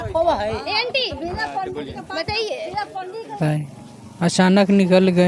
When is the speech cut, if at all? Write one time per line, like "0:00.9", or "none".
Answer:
0:03.4